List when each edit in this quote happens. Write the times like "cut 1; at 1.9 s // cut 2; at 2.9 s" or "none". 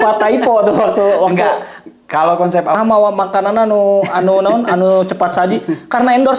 cut 1; at 2.8 s